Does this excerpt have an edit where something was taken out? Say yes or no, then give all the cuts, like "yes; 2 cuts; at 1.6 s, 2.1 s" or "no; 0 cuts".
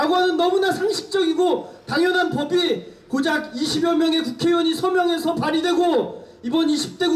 no; 0 cuts